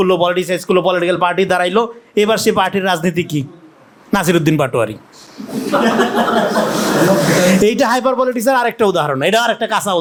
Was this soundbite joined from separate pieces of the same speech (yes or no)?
no